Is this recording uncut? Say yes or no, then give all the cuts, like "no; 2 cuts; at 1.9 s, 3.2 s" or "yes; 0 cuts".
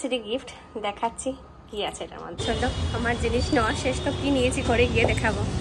no; 1 cut; at 2.4 s